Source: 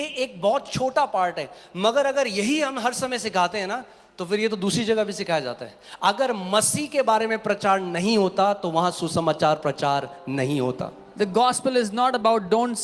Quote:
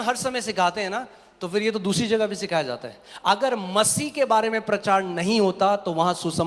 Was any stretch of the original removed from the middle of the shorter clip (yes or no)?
no